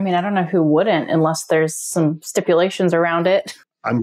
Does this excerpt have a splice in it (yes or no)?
no